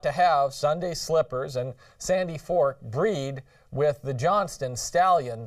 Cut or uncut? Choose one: uncut